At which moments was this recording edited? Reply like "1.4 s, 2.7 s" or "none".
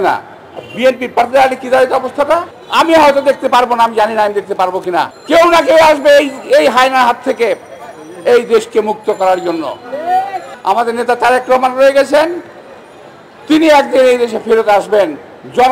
2.6 s, 5.2 s, 10.5 s